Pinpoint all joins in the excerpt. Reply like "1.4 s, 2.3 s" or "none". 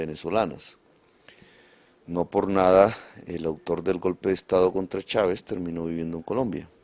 none